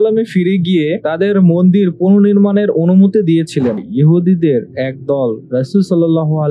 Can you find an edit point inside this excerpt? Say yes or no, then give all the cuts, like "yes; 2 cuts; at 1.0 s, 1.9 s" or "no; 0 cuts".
yes; 1 cut; at 3.8 s